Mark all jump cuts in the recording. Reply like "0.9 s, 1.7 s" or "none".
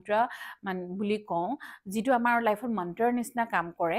none